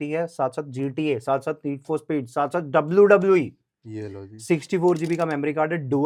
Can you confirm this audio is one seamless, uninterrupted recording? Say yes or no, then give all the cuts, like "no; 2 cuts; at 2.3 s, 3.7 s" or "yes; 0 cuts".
yes; 0 cuts